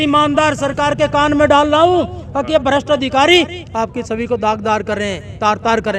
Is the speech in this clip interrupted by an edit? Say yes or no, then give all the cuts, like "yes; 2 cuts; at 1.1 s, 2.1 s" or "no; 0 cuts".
no; 0 cuts